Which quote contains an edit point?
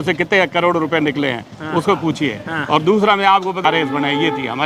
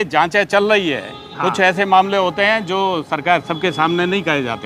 first; 1 cut; at 3.6 s

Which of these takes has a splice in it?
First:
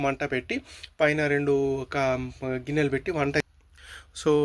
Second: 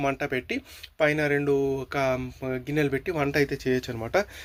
first; 1 cut; at 3.4 s

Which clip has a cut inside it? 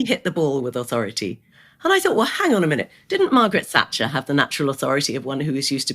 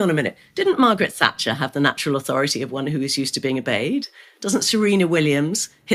first; 1 cut; at 1.6 s

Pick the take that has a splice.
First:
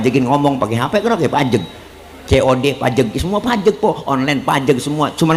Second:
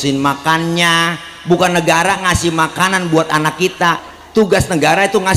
second; 1 cut; at 4.1 s

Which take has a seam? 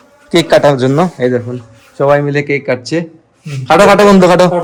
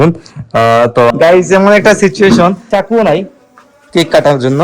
second; 2 cuts; at 1.1 s, 2.6 s

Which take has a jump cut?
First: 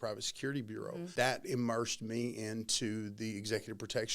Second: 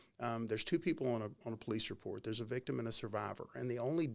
first; 1 cut; at 1.1 s

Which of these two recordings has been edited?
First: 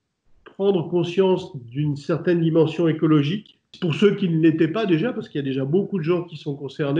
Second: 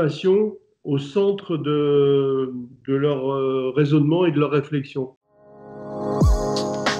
second; 1 cut; at 5.2 s

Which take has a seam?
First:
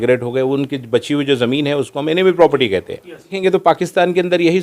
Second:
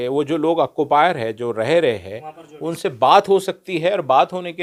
first; 1 cut; at 3.3 s

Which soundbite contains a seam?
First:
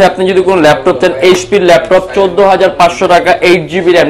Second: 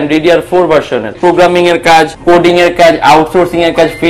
second; 2 cuts; at 1.1 s, 2.1 s

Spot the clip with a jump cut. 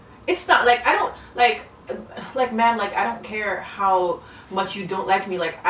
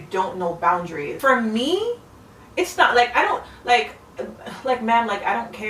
second; 1 cut; at 1.1 s

